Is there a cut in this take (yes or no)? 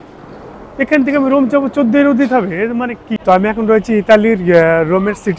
yes